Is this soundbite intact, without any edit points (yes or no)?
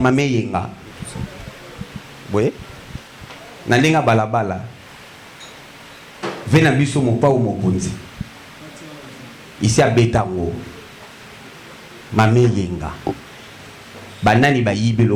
yes